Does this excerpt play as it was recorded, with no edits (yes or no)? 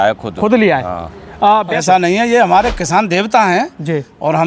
no